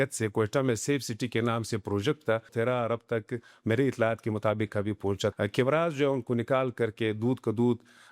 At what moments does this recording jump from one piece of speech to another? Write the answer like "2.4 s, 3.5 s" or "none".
2.5 s, 5.3 s

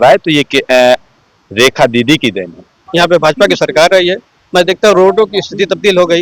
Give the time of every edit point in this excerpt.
2.7 s

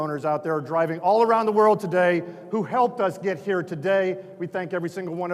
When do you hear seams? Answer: none

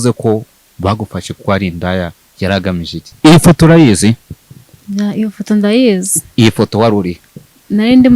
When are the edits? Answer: 3.0 s

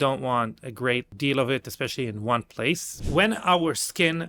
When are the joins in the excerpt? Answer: 1.1 s, 2.9 s

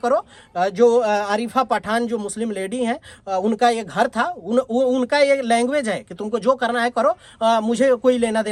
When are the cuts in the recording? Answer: none

